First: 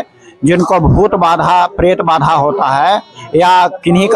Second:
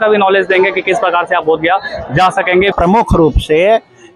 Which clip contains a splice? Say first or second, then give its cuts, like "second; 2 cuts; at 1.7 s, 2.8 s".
second; 1 cut; at 2.7 s